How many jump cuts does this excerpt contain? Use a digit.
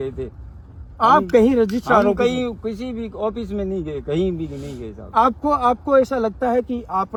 0